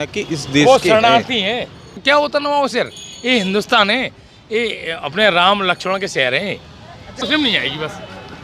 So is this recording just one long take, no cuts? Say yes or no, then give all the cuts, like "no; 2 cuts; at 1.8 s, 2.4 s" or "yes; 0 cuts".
no; 2 cuts; at 1.9 s, 7.2 s